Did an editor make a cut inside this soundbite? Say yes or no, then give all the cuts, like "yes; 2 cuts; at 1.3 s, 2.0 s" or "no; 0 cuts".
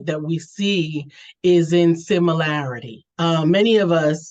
yes; 1 cut; at 3.0 s